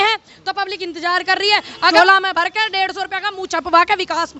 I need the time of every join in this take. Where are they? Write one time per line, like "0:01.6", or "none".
0:01.9